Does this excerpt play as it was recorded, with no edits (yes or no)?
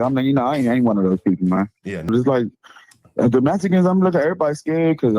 no